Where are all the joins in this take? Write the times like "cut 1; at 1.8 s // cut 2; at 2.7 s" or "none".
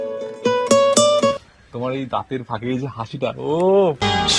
cut 1; at 1.3 s